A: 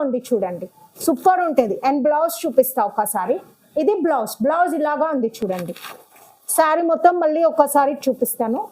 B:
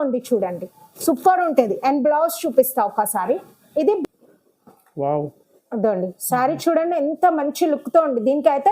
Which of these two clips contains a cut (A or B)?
B